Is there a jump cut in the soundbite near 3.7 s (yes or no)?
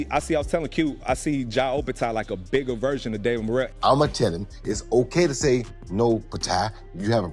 yes